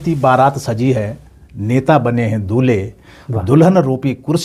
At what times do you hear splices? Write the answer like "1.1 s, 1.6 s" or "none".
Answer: none